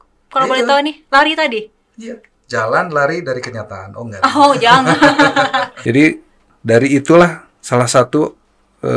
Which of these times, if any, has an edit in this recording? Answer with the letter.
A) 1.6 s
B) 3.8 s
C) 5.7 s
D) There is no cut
C